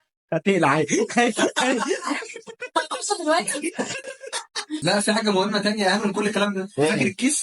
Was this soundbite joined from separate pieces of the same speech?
yes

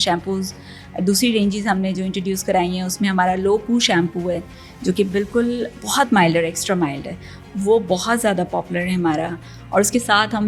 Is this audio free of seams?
yes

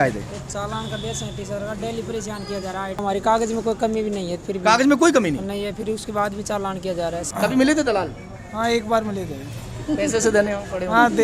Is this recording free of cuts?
no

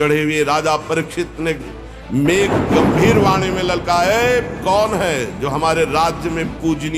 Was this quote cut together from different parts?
no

